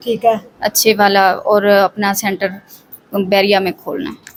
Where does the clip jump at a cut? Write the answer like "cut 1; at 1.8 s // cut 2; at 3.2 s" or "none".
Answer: none